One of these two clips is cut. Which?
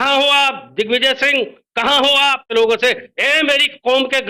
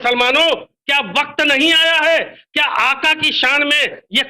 first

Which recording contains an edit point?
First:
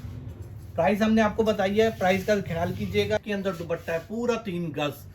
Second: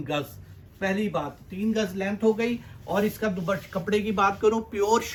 first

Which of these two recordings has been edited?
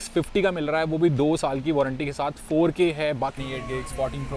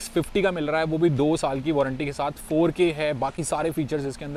first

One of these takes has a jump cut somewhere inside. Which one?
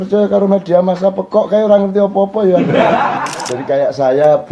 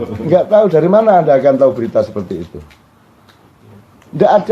first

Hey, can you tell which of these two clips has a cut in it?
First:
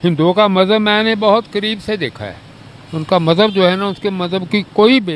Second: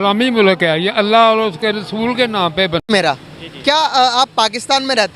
second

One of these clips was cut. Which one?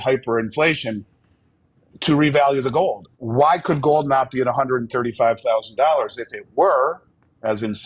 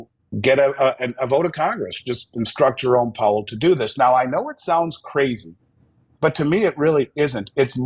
first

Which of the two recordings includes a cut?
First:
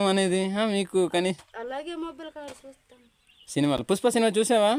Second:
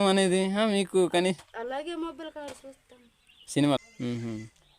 second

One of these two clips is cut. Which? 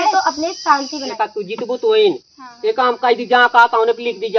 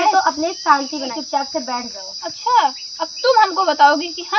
first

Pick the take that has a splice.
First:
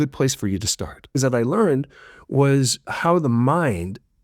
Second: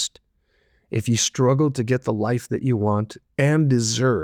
first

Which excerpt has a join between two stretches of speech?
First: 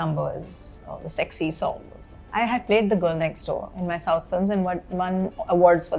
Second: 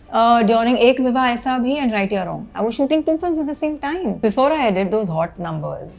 second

